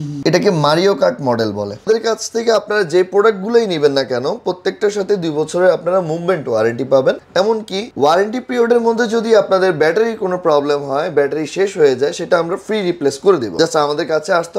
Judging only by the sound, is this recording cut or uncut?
cut